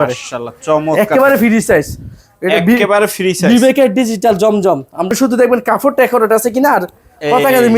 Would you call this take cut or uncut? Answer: cut